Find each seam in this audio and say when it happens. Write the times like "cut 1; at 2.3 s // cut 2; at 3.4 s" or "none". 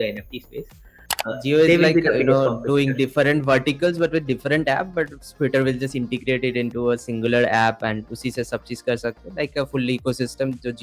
cut 1; at 1.1 s